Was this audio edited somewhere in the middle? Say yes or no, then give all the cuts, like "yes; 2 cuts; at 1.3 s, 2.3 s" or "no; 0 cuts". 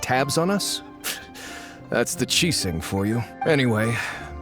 yes; 1 cut; at 3.5 s